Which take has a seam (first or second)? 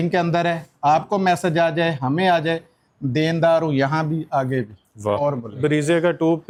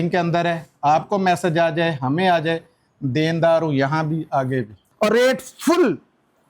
second